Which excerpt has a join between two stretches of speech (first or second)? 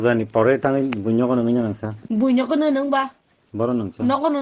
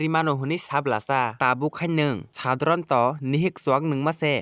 first